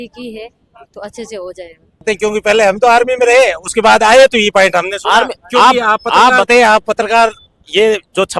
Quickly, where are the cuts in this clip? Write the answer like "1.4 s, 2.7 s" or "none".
2.0 s